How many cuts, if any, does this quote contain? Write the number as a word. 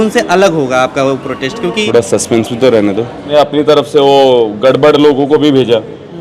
two